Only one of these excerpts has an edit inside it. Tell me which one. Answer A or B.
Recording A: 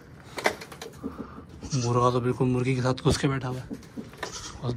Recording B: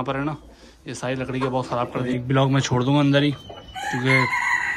B